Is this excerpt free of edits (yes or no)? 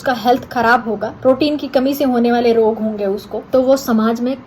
no